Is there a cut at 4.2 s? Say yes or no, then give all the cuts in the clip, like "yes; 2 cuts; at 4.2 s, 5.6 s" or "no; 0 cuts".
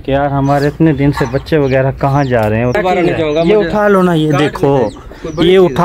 no; 1 cut; at 2.8 s